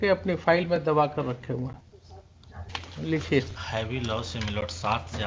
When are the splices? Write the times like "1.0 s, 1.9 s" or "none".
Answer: 2.5 s